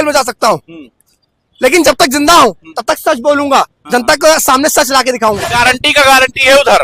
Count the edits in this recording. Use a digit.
1